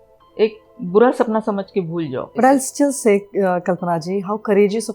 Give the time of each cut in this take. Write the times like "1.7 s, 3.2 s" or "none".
2.4 s